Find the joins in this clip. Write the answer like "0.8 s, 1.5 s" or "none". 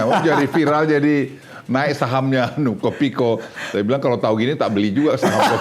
none